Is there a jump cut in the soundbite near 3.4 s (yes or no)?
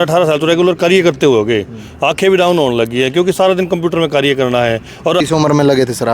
no